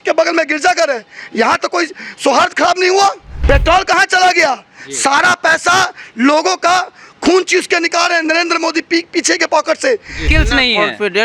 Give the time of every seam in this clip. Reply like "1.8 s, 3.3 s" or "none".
3.3 s, 10.2 s